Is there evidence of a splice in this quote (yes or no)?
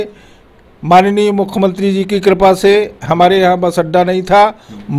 no